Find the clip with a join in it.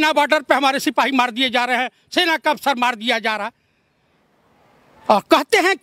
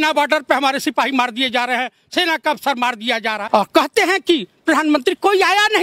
second; 1 cut; at 3.4 s

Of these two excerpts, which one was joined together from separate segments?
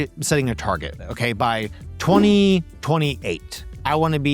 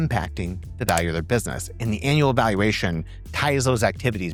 first; 1 cut; at 2.7 s

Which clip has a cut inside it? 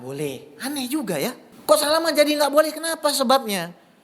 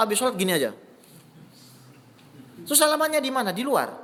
first; 1 cut; at 1.5 s

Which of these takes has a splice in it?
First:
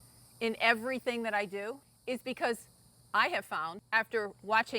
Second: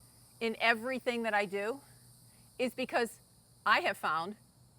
first; 2 cuts; at 1.9 s, 3.8 s

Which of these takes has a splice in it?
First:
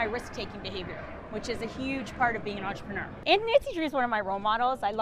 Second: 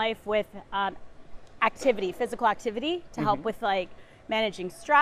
first; 1 cut; at 3.1 s

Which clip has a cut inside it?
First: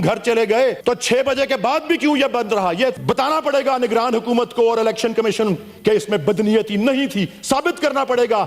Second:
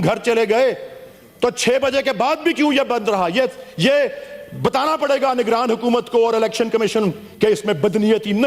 first; 2 cuts; at 0.8 s, 3.0 s

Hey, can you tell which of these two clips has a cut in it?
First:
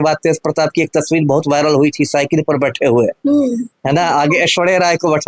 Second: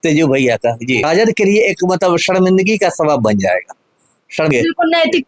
second; 2 cuts; at 1.0 s, 4.5 s

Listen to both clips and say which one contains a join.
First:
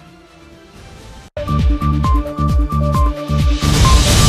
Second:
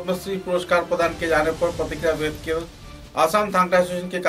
first; 1 cut; at 1.2 s

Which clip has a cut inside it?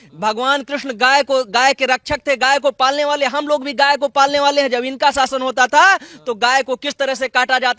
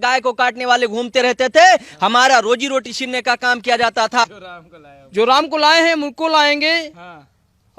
second; 1 cut; at 4.2 s

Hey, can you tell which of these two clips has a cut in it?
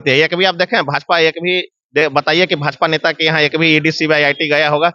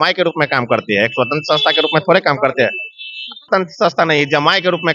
second; 1 cut; at 3.5 s

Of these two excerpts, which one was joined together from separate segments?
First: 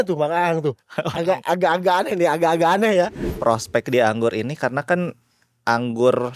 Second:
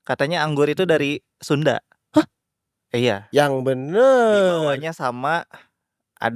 first; 1 cut; at 3.3 s

